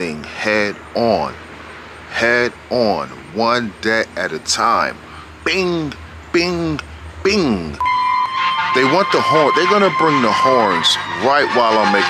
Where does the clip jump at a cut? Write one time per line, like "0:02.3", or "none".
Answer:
0:07.9